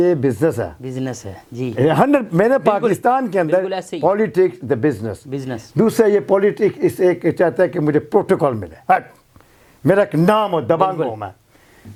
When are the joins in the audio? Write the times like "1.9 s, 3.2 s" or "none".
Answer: none